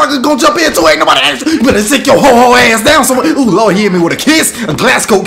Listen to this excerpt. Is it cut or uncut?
uncut